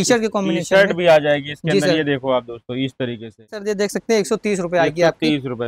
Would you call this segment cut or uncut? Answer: cut